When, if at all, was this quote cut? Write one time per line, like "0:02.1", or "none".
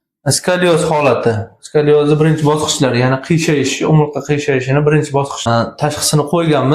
0:05.5

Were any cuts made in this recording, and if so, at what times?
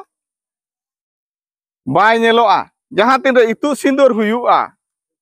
0:02.8

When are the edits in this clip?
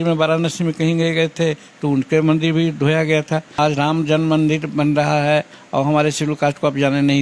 0:03.5

